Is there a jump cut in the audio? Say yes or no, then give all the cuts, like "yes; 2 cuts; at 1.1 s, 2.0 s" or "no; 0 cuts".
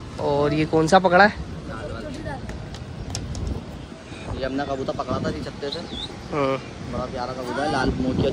no; 0 cuts